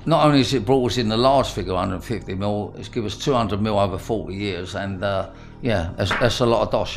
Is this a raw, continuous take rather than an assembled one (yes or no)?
yes